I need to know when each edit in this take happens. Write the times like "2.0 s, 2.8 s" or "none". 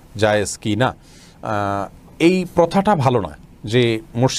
none